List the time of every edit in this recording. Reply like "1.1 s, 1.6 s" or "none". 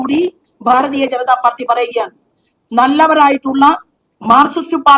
none